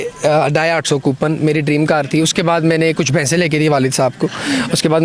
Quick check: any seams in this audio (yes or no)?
no